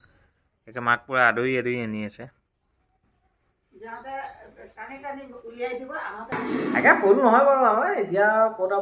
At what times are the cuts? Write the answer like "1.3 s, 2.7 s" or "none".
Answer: 6.4 s